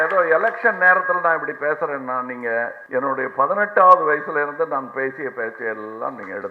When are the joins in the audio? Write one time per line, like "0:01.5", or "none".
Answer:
0:02.8

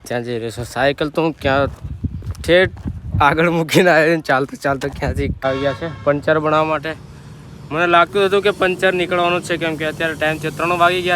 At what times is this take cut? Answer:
0:05.4

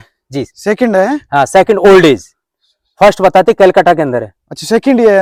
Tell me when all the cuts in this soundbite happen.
none

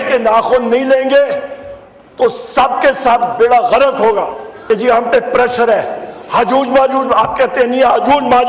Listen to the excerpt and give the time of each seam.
0:04.5

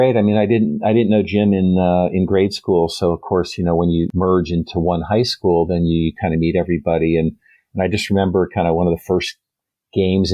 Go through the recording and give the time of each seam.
0:04.1

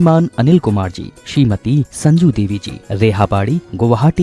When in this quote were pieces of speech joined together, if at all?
none

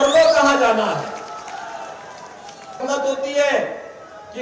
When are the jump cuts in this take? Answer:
0:02.8

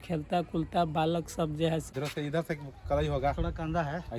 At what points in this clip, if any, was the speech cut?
0:01.9

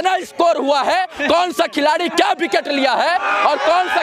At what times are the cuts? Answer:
none

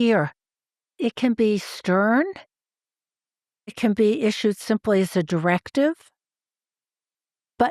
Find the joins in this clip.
none

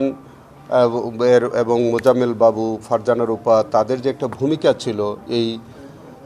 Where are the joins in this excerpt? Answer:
none

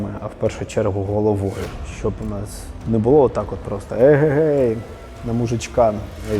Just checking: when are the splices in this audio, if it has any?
0:01.9

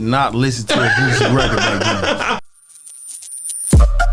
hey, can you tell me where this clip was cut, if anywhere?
0:02.4

